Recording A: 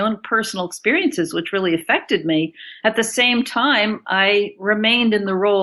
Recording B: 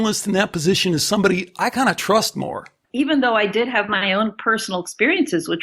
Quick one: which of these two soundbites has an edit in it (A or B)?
B